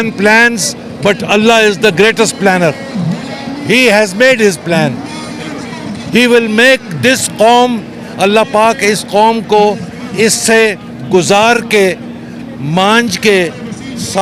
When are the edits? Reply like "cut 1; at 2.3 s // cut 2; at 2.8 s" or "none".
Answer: none